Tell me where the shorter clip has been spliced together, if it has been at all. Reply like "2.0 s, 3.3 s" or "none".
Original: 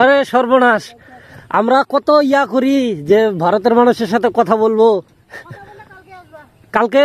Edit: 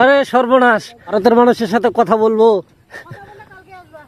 1.1 s